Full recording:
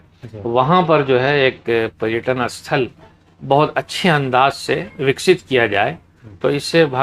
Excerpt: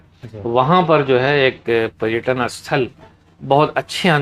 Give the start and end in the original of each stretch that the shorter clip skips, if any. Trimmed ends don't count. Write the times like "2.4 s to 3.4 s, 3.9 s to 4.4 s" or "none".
none